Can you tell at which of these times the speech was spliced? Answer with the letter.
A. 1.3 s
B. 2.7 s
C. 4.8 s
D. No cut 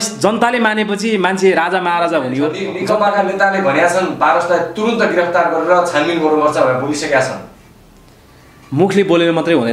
B